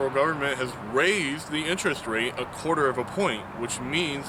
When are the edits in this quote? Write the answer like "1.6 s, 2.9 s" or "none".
none